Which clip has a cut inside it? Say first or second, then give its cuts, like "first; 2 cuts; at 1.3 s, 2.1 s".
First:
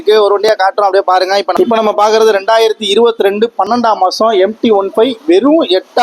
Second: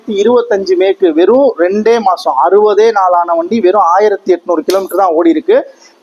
first; 1 cut; at 1.5 s